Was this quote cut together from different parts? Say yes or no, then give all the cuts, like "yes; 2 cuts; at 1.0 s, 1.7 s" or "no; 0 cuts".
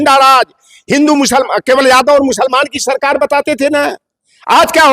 no; 0 cuts